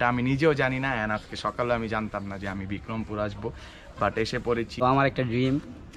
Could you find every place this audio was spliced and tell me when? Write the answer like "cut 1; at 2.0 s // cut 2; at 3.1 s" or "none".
cut 1; at 4.7 s

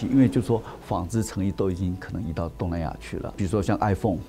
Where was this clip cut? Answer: cut 1; at 3.3 s

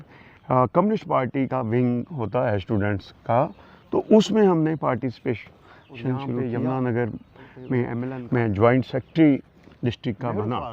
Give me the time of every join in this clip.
cut 1; at 6.4 s // cut 2; at 8.1 s

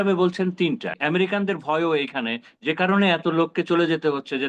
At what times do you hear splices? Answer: cut 1; at 1.0 s

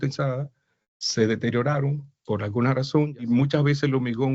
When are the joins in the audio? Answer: cut 1; at 3.3 s

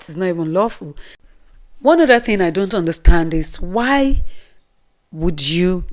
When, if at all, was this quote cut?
none

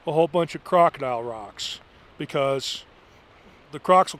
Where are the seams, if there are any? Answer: none

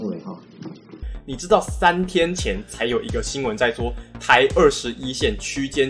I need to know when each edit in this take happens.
cut 1; at 0.9 s

